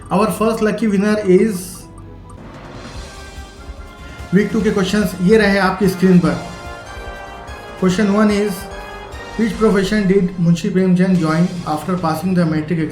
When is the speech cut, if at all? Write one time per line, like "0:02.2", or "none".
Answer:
0:02.4